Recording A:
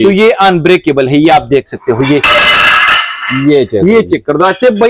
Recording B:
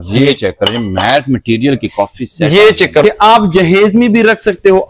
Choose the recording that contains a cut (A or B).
B